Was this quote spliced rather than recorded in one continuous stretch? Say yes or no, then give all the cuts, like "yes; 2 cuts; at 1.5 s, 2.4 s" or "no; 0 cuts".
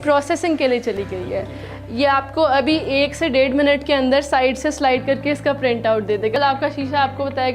yes; 1 cut; at 6.4 s